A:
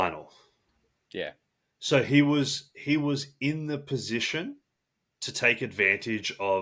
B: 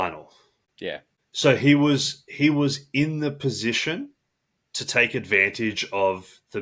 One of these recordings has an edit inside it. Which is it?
B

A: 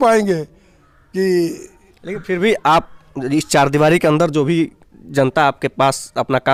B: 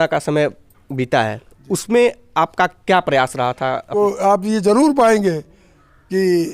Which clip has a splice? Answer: B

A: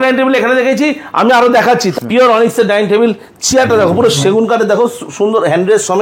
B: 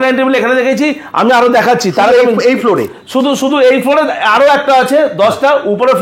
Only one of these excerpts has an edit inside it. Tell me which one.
A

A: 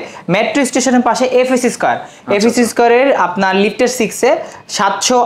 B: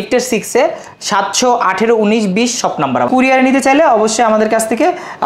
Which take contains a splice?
B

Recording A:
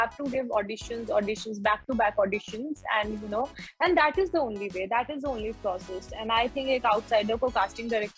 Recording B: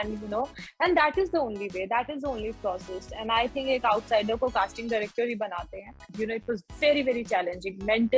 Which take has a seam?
B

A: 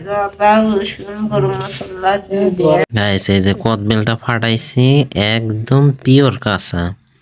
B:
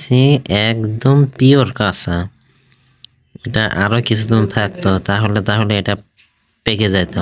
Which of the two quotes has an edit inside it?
A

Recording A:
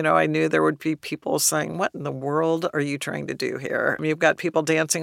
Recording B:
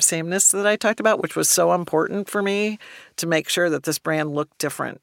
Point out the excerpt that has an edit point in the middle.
A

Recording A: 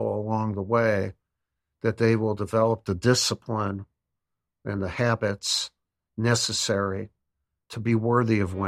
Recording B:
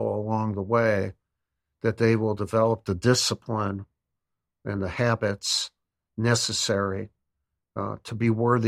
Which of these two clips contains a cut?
A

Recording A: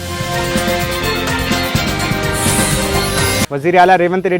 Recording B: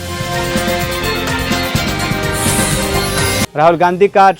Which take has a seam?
A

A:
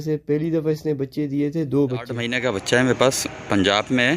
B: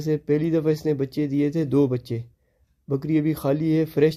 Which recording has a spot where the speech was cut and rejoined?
A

